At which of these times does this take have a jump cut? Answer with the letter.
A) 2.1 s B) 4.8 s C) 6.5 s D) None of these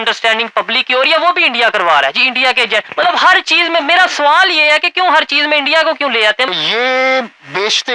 C